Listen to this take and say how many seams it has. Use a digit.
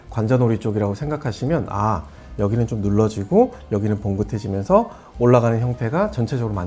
0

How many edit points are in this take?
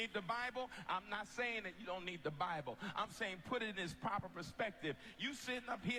0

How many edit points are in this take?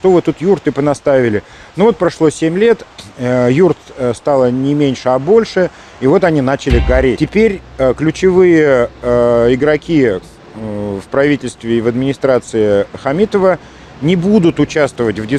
1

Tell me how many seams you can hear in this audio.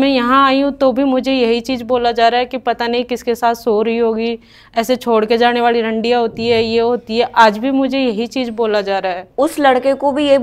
1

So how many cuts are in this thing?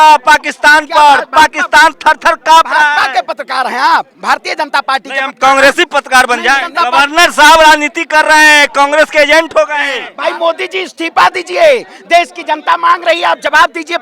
2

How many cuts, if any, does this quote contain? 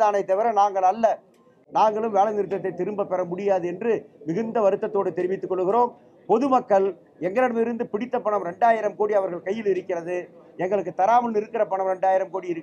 1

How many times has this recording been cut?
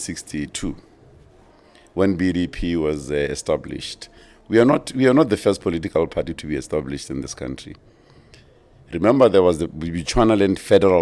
0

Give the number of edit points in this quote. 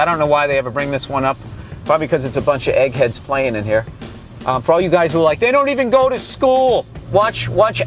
0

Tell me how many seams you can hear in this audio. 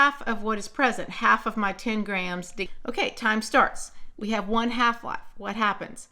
1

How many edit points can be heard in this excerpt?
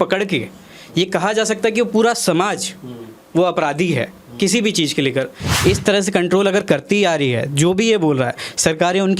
1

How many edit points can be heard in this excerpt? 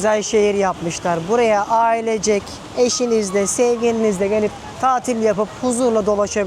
0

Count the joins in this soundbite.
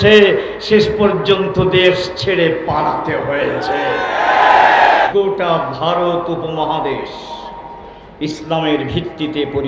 1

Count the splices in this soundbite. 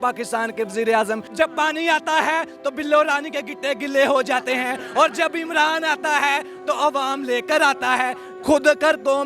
2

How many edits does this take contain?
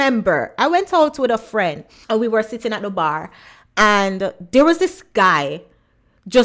0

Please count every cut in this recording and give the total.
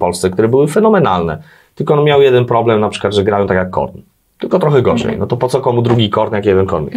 0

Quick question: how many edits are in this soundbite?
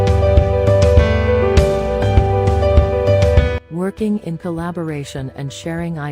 1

